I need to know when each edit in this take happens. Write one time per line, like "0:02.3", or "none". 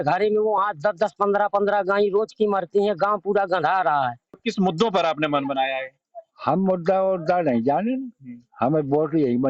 0:04.4